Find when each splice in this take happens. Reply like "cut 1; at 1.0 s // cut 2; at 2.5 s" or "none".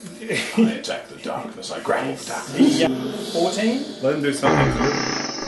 cut 1; at 2.9 s